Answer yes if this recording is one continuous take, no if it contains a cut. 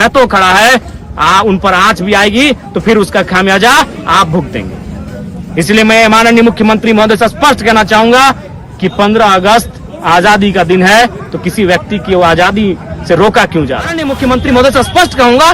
no